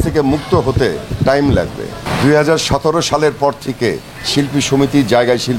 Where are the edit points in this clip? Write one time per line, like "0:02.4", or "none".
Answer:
0:01.0
0:02.0